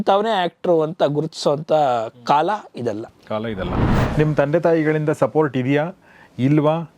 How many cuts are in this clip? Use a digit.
1